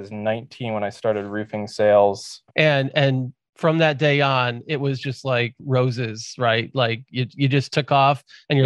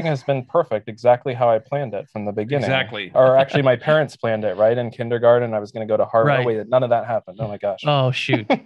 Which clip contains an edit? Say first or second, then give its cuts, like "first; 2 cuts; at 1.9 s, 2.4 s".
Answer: first; 1 cut; at 2.3 s